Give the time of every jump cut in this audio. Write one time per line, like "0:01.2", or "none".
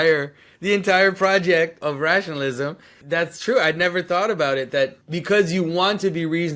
0:01.8
0:02.9
0:05.0